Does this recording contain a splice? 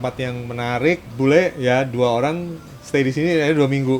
yes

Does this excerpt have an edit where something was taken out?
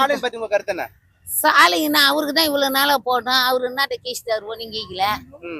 no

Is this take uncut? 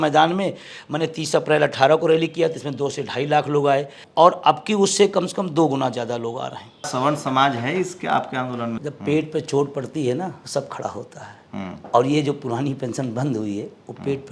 no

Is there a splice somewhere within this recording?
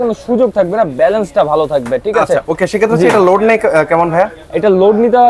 no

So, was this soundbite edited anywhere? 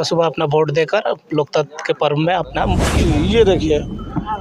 yes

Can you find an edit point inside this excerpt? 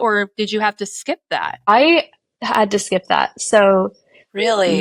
no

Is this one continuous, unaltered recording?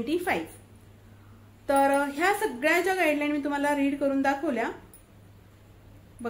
yes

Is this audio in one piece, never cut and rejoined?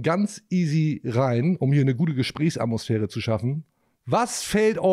yes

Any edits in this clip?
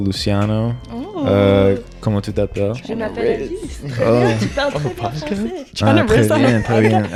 no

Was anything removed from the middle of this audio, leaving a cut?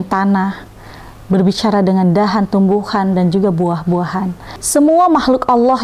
yes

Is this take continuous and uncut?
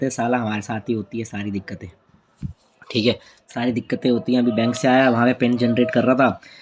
yes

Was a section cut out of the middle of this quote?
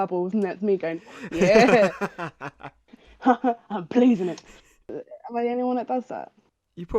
yes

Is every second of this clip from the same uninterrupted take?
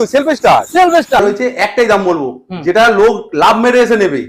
no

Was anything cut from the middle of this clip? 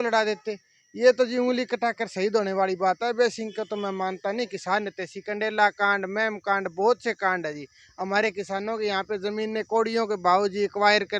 no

